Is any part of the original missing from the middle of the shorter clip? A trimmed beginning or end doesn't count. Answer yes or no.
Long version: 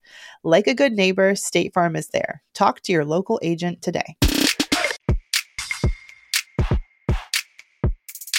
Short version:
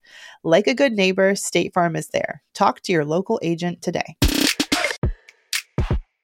yes